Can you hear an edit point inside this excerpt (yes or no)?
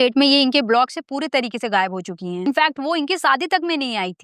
no